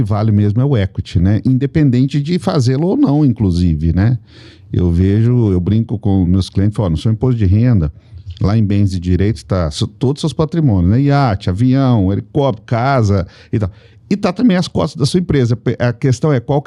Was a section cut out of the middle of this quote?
no; 0 cuts

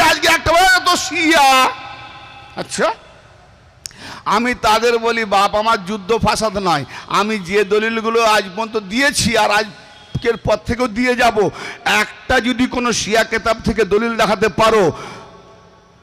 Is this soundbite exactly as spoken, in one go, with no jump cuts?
yes; 0 cuts

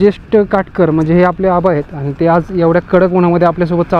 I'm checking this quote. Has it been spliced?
no; 0 cuts

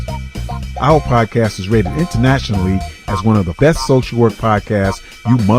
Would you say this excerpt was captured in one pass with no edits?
no; 1 cut; at 3.6 s

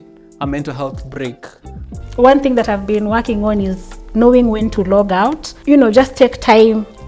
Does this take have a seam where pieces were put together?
yes; 2 cuts; at 2.0 s, 5.5 s

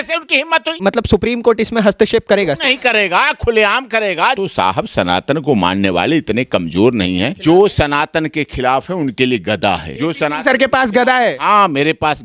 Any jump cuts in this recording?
yes; 4 cuts; at 0.8 s, 4.4 s, 7.3 s, 9.9 s

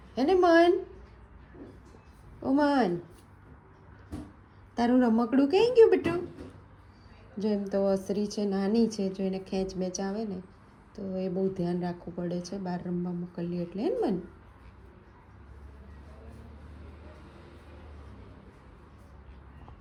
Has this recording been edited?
no; 0 cuts

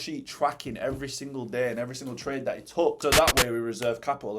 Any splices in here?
yes; 1 cut; at 3.0 s

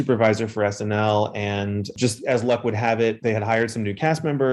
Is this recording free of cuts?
no; 1 cut; at 1.9 s

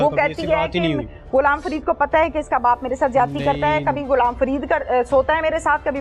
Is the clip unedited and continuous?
yes; 0 cuts

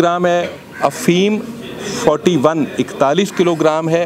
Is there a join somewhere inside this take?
no; 0 cuts

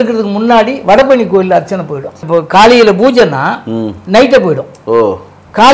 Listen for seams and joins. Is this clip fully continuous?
no; 2 cuts; at 2.2 s, 3.9 s

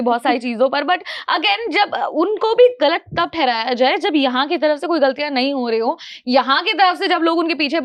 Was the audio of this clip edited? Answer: no; 0 cuts

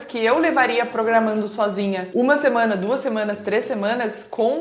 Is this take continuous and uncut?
no; 1 cut; at 2.0 s

